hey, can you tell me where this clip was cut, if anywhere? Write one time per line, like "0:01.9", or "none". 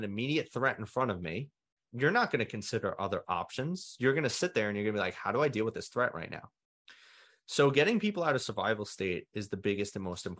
0:01.9